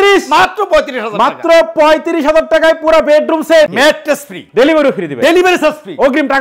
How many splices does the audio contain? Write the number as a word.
one